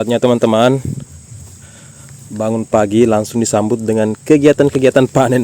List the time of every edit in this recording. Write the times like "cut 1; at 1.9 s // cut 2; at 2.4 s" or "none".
none